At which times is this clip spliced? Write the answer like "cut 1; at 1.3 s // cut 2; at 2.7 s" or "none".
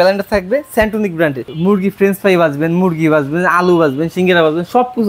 cut 1; at 1.5 s